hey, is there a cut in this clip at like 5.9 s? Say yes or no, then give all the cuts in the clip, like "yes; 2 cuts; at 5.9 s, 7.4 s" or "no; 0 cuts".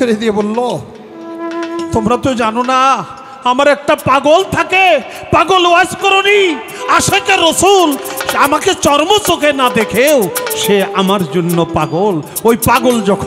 no; 0 cuts